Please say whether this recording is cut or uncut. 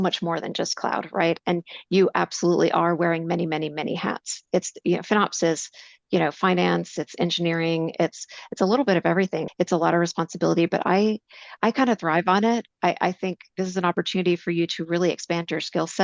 cut